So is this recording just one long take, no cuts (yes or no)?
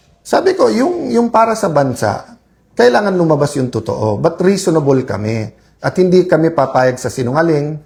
yes